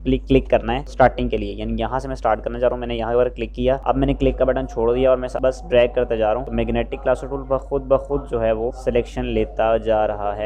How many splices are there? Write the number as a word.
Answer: zero